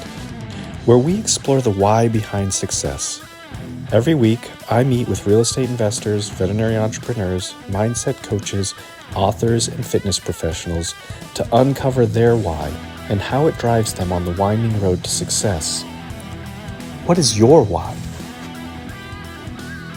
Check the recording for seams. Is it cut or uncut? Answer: uncut